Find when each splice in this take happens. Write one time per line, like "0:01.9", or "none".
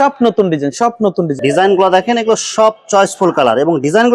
0:01.3

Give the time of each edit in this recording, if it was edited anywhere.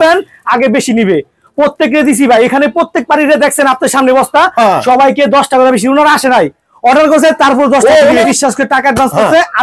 0:08.3

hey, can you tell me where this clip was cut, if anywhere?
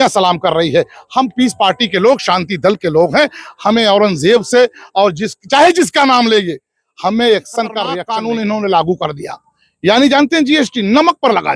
0:08.0

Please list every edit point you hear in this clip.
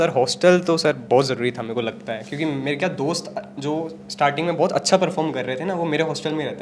none

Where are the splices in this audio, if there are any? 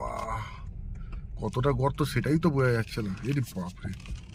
none

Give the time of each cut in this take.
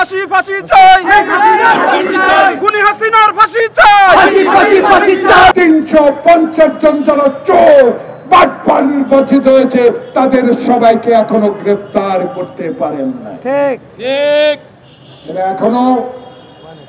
0:05.5

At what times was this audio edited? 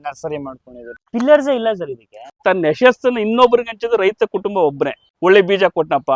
0:01.0
0:02.4
0:05.1

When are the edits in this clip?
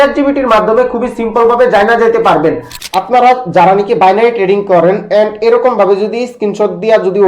0:02.7

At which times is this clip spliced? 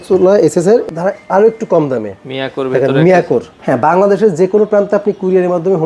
0:00.8
0:03.5

